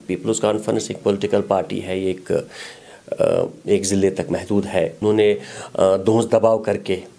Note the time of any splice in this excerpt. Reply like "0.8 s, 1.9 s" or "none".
5.0 s